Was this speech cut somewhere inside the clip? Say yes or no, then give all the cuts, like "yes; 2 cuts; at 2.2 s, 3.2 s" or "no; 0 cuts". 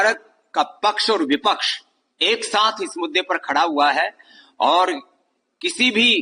no; 0 cuts